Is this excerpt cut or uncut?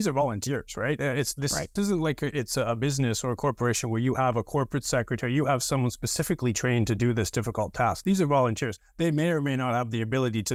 uncut